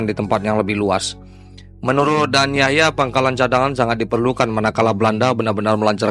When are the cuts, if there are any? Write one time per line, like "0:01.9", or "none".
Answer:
none